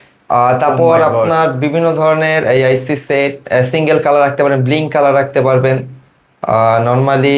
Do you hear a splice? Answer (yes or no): no